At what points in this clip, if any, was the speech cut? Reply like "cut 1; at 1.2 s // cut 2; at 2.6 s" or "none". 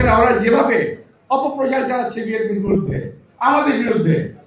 none